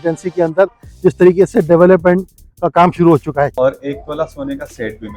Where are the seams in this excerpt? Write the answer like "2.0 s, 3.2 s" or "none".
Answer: 3.5 s